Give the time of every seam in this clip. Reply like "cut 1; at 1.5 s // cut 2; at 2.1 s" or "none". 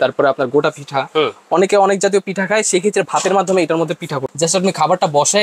cut 1; at 4.3 s